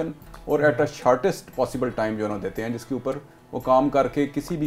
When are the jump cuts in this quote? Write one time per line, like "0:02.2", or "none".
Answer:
none